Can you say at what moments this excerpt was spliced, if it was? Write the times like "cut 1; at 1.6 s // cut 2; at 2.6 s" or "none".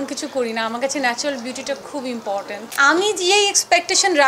cut 1; at 2.6 s